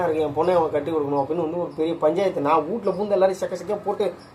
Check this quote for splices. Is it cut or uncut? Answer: uncut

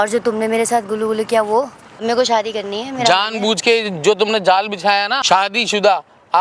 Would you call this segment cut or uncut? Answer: cut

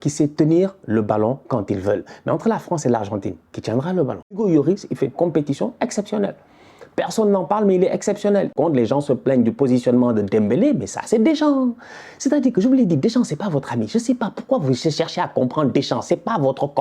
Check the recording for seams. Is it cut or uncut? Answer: cut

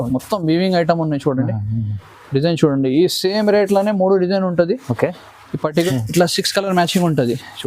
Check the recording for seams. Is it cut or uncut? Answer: cut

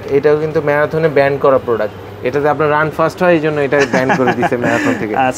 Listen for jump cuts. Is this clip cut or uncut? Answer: uncut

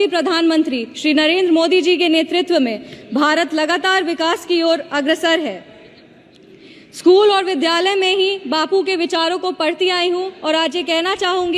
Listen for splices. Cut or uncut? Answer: uncut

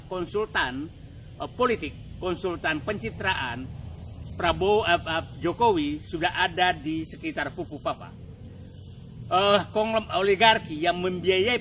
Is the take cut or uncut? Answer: uncut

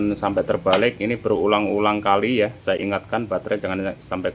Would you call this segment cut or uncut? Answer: uncut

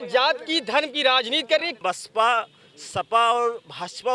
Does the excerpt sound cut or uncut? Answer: cut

